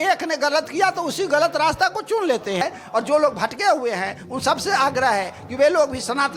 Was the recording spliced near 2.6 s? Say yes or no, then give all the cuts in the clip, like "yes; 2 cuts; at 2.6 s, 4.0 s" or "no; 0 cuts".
yes; 1 cut; at 2.6 s